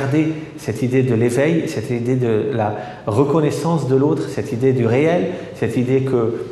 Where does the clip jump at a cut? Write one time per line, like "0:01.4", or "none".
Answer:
none